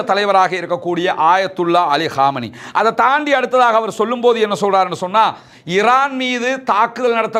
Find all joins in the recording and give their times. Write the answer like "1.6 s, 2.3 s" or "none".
none